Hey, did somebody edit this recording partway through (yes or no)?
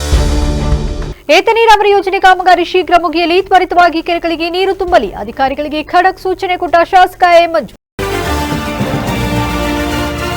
yes